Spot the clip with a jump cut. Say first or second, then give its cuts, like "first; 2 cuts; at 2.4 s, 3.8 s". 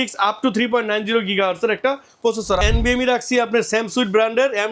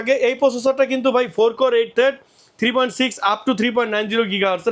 first; 1 cut; at 2.6 s